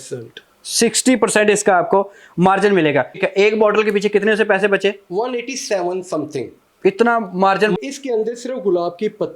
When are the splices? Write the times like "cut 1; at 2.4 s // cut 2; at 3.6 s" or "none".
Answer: cut 1; at 3.2 s // cut 2; at 7.8 s